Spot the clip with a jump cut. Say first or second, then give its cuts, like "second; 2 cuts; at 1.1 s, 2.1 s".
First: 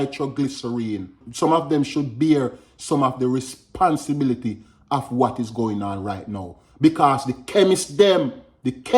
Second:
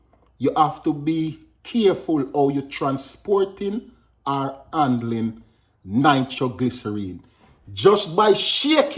first; 1 cut; at 1.2 s